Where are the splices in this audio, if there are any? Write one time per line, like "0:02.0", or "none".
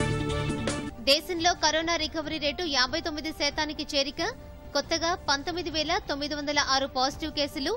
0:00.9